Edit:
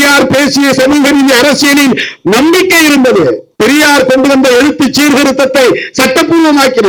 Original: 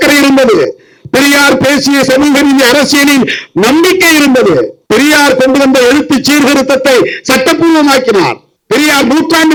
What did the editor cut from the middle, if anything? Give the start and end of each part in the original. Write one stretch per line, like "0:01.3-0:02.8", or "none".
none